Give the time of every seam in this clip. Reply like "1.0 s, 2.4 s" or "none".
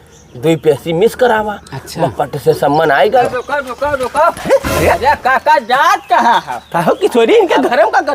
3.2 s